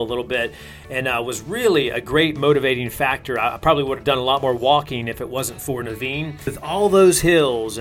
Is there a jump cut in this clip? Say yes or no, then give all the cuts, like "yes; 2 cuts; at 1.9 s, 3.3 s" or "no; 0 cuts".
yes; 1 cut; at 6.6 s